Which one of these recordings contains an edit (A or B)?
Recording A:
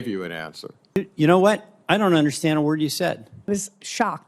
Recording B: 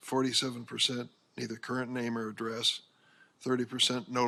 A